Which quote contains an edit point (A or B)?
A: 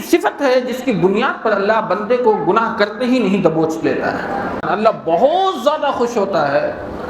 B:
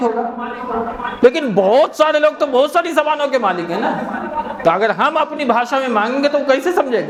A